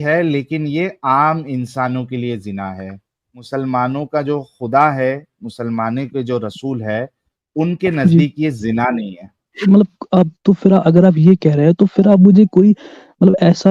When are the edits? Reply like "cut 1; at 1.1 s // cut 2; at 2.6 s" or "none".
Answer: cut 1; at 3.3 s // cut 2; at 9.6 s

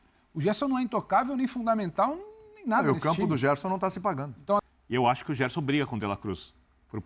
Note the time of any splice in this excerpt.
cut 1; at 4.7 s

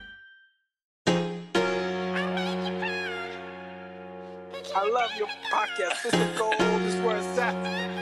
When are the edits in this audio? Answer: cut 1; at 0.9 s

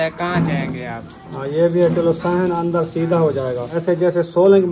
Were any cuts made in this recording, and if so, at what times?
cut 1; at 3.7 s

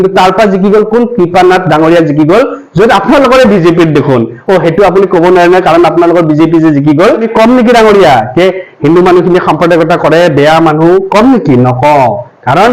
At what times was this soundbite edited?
cut 1; at 7.3 s

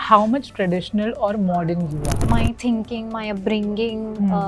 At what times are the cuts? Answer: cut 1; at 2.1 s

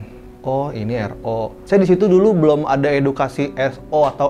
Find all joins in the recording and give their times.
cut 1; at 1.6 s

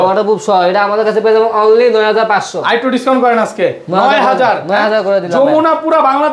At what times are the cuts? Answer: none

